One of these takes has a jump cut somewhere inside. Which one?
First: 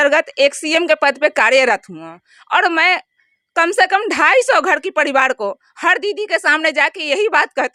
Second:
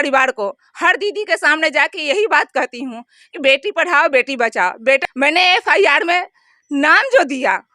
second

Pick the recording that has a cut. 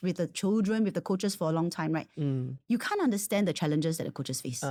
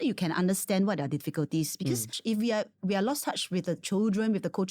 second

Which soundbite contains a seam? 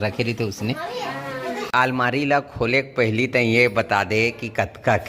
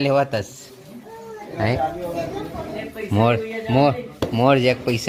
first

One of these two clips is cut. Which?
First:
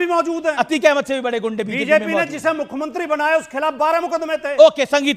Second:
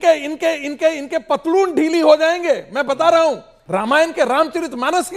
second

